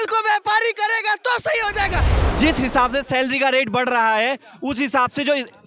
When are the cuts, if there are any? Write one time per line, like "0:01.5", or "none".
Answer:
0:02.1

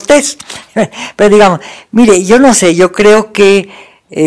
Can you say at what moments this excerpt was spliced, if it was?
none

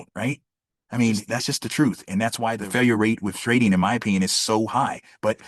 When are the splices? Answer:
0:01.3
0:02.6

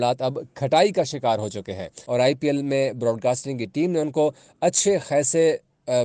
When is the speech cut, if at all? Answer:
0:01.9

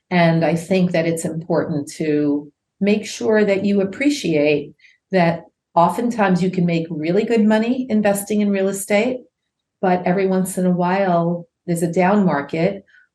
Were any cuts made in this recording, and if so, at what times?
0:05.5

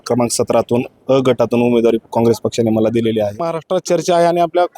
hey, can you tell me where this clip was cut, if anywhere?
0:03.5

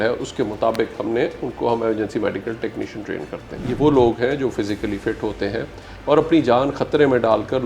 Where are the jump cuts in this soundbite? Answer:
0:03.6

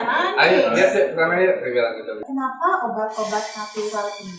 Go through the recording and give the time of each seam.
0:02.2

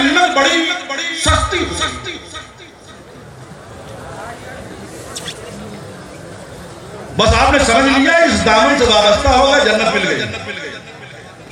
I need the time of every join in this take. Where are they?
none

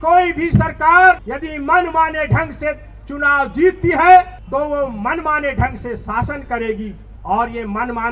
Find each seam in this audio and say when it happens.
0:01.3
0:04.4
0:07.1

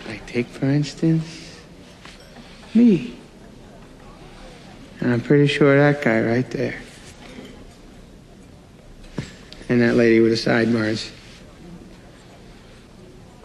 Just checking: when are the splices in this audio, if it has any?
none

